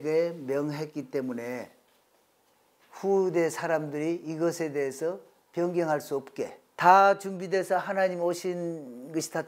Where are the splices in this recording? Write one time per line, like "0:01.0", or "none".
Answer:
0:06.6